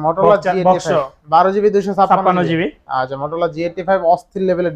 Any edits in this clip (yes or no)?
no